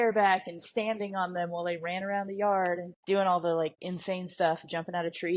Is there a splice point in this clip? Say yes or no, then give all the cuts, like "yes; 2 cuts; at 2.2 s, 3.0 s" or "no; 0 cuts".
yes; 2 cuts; at 2.9 s, 3.9 s